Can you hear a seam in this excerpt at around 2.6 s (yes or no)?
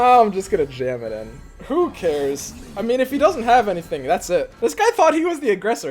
no